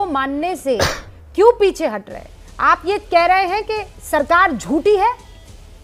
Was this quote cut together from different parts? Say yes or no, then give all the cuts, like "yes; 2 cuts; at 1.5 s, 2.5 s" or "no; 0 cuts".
no; 0 cuts